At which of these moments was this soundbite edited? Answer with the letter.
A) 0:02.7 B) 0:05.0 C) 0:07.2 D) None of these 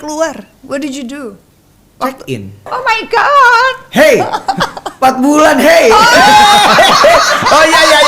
A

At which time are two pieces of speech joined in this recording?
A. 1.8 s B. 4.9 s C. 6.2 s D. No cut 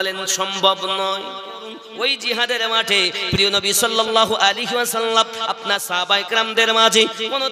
A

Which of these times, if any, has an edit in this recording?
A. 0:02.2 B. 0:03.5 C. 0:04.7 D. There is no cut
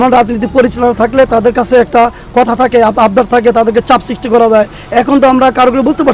D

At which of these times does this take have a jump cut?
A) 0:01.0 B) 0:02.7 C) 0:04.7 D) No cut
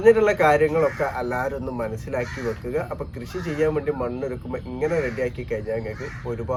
D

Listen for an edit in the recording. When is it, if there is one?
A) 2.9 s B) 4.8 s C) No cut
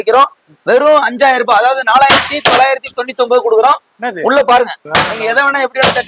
B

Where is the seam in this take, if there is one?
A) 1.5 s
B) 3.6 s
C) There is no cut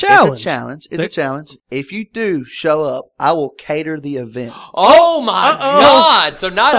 A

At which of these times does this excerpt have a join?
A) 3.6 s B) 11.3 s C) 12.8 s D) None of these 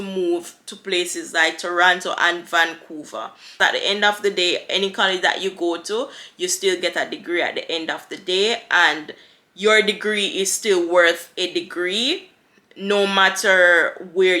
A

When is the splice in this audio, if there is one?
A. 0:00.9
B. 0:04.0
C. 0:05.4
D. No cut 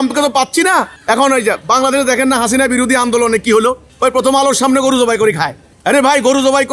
A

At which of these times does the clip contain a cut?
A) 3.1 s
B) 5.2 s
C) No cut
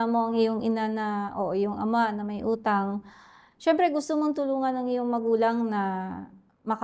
C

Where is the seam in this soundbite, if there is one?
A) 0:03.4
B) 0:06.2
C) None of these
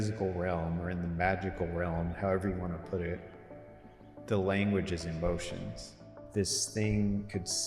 B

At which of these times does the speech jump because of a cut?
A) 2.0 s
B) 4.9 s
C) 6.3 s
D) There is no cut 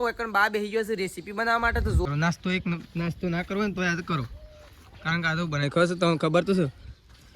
A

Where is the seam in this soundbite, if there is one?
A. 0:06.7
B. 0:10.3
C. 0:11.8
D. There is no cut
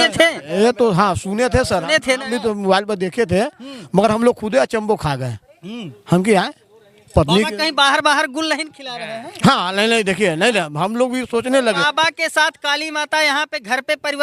C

